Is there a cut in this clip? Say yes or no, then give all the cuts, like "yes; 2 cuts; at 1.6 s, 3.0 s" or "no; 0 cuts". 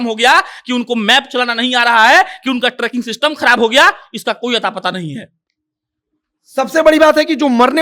no; 0 cuts